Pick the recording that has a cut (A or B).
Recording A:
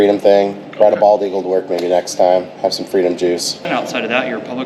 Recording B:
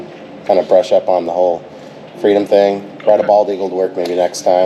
A